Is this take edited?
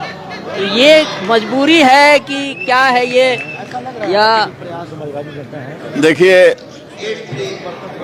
no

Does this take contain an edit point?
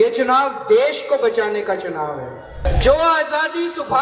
yes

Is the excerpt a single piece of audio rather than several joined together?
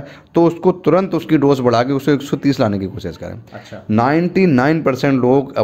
yes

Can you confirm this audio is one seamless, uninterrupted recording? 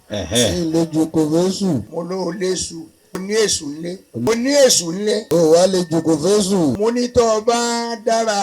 no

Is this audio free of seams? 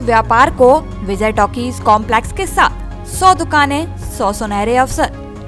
yes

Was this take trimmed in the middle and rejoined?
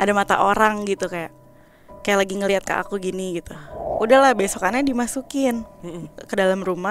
yes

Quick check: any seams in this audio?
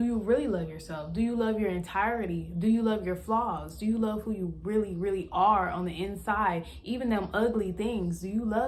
no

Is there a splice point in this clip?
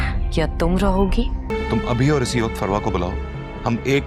yes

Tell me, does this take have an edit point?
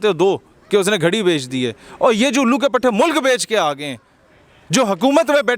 no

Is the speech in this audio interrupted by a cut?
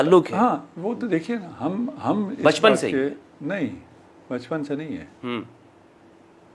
no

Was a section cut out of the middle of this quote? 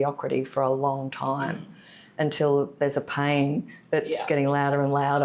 no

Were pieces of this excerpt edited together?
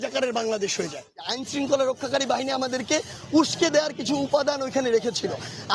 yes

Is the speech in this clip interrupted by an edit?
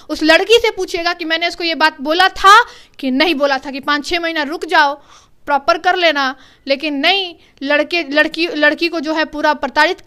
no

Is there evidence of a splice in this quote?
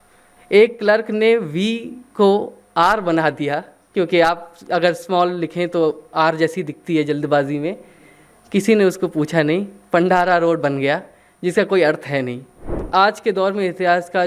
yes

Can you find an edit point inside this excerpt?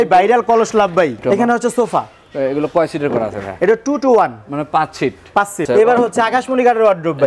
yes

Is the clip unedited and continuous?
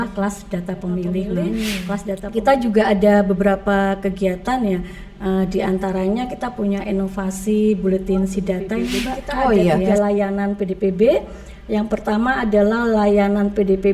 no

